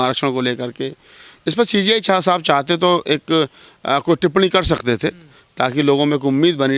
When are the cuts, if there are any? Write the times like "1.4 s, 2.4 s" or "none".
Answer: none